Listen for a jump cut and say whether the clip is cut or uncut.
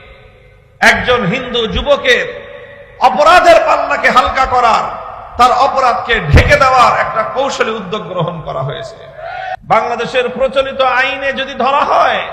cut